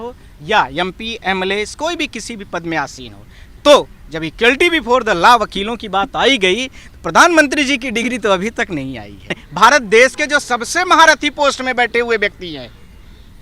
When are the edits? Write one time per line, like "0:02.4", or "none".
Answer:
0:09.5